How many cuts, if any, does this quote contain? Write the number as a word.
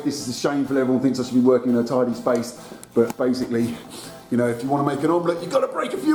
zero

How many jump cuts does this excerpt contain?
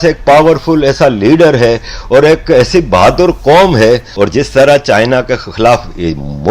one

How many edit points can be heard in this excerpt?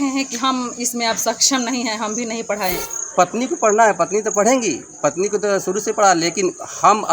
one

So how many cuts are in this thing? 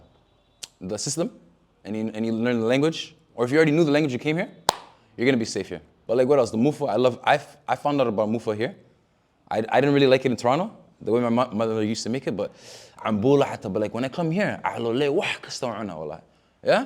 one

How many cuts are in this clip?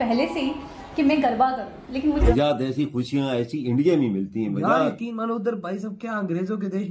one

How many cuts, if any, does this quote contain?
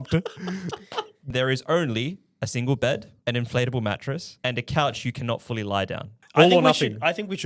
four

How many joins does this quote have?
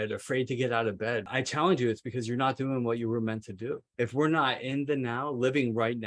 two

